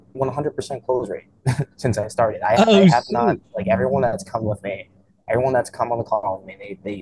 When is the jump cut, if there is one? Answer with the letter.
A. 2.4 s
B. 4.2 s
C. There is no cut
C